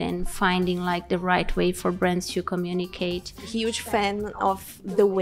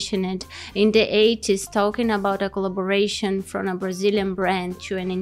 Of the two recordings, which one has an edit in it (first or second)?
first